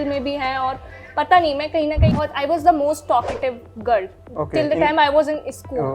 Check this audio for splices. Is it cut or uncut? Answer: cut